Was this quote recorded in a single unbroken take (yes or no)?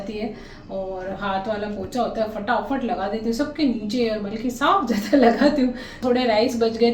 no